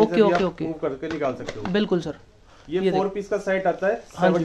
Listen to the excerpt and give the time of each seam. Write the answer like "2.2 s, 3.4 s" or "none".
none

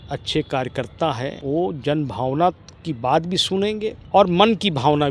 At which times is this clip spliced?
1.4 s, 4.0 s

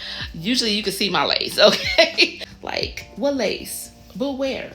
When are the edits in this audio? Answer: 2.5 s

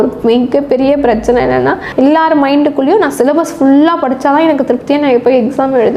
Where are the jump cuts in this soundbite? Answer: none

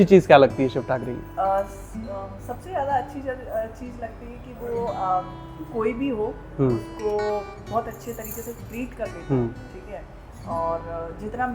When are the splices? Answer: none

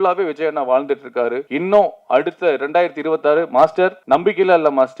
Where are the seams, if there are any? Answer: 1.4 s, 4.0 s

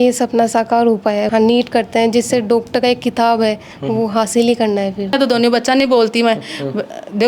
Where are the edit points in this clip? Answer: 1.3 s, 5.1 s

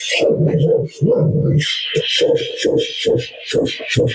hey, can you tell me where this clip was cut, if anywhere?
none

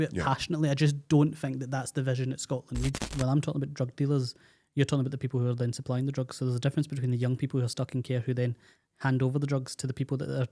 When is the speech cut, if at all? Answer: 3.0 s

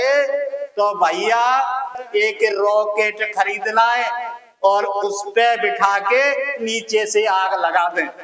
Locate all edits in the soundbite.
2.0 s

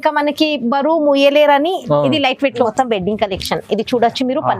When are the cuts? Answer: 2.7 s

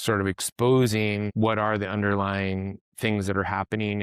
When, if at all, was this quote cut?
1.3 s

